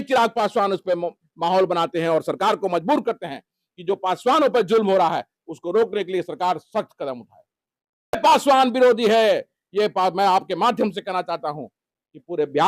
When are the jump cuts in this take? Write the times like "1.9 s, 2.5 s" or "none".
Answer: 8.1 s